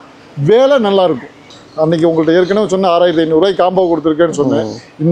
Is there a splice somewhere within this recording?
yes; 1 cut; at 1.5 s

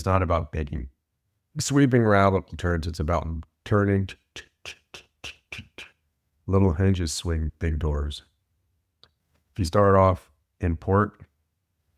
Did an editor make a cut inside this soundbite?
yes; 1 cut; at 7.5 s

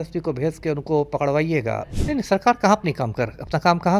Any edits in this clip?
yes; 1 cut; at 1.9 s

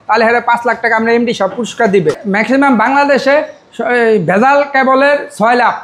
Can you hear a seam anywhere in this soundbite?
yes; 1 cut; at 2.2 s

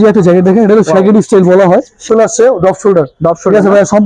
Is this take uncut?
no; 1 cut; at 2.0 s

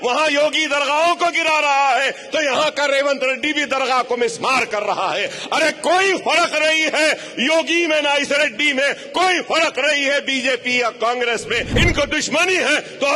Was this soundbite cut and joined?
yes; 1 cut; at 11.7 s

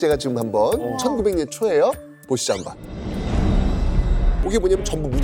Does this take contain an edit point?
yes; 1 cut; at 4.3 s

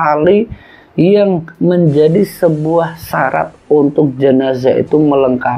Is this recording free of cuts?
yes; 0 cuts

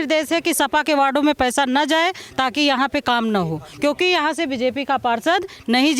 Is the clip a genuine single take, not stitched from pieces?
yes; 0 cuts

